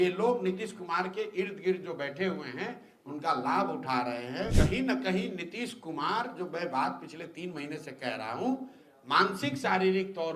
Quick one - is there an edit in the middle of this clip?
yes; 1 cut; at 4.6 s

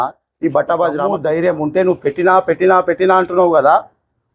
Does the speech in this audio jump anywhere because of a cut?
yes; 1 cut; at 1.2 s

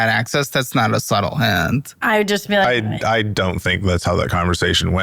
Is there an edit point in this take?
no; 0 cuts

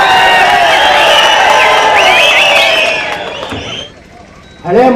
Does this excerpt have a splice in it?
yes; 1 cut; at 3.9 s

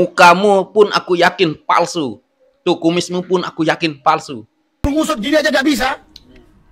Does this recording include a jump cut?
yes; 1 cut; at 4.8 s

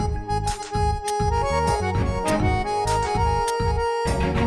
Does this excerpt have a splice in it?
no; 0 cuts

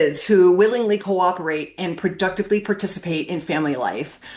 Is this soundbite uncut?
yes; 0 cuts

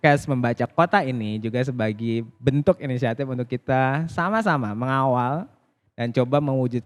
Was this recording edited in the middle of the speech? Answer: no; 0 cuts

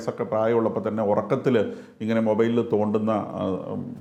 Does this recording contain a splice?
no; 0 cuts

